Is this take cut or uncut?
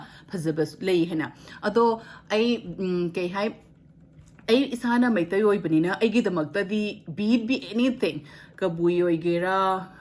uncut